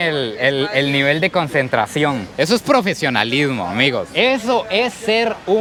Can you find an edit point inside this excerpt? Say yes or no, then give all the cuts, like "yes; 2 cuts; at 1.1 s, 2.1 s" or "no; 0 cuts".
no; 0 cuts